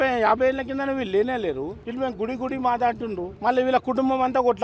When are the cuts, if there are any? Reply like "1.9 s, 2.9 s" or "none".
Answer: 1.8 s, 3.3 s